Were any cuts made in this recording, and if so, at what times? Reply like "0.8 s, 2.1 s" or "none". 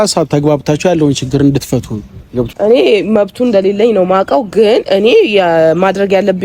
2.5 s